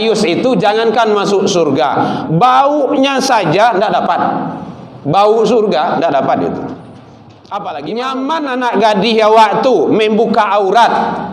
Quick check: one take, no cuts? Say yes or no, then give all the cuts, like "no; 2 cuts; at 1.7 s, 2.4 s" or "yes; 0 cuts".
no; 1 cut; at 7.9 s